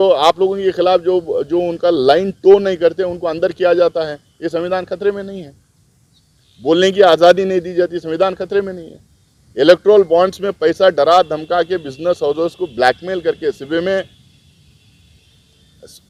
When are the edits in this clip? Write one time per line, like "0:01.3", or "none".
none

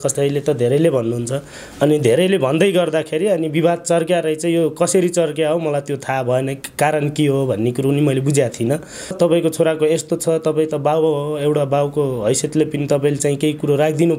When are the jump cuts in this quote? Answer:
0:09.1

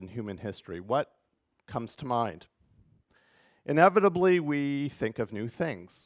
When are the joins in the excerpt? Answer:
0:04.9

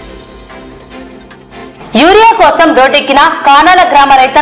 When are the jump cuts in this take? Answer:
0:01.7

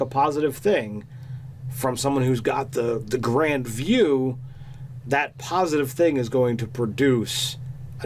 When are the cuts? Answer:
none

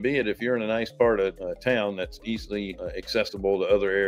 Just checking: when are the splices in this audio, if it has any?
0:01.4
0:02.8

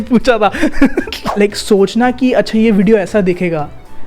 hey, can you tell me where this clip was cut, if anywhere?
0:01.2

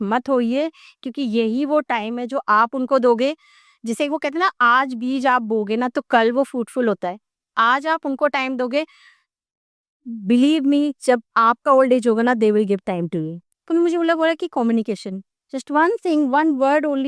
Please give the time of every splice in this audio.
0:13.4

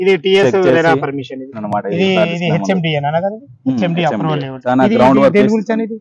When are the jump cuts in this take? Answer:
0:01.6
0:04.5

